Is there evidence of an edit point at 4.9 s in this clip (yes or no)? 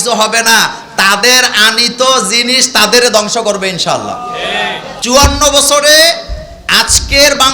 yes